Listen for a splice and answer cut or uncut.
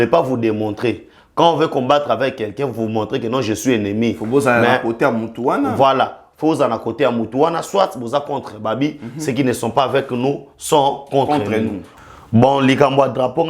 cut